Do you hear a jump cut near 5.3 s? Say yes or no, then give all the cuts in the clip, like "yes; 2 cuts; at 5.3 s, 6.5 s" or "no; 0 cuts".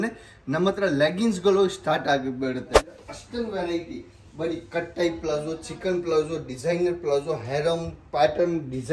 no; 1 cut; at 3.0 s